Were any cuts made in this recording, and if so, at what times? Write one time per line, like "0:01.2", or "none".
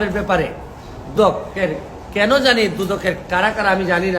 0:01.1

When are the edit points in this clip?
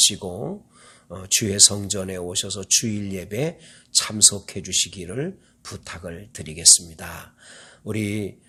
none

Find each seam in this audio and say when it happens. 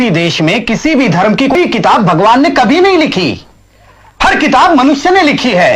0:01.5

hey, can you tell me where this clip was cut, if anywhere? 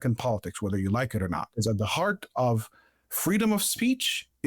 0:01.5

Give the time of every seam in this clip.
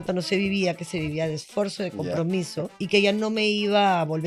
0:02.8

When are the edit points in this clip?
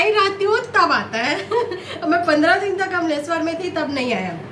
none

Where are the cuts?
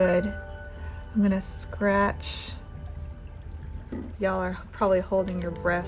0:03.9

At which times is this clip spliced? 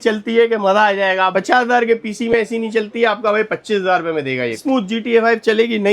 0:04.6

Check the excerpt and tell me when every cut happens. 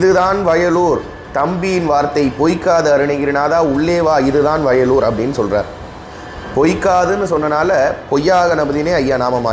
none

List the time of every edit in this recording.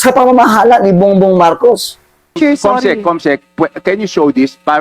0:02.3

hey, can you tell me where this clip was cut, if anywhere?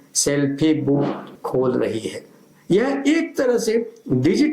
0:01.3
0:02.5

